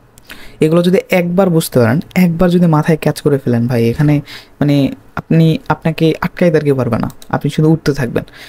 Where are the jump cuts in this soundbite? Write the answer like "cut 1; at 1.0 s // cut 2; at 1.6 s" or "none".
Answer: none